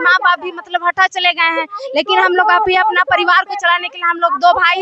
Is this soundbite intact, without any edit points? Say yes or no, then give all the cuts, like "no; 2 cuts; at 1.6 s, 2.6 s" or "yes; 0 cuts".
yes; 0 cuts